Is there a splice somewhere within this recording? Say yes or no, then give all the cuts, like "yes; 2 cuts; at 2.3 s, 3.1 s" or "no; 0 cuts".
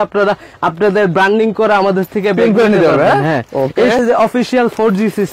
yes; 1 cut; at 4.0 s